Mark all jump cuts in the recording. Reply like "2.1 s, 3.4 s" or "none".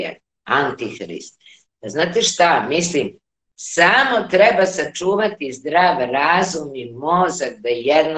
none